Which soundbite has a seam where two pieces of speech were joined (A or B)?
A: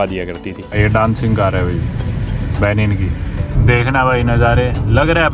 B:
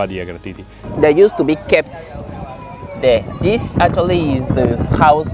A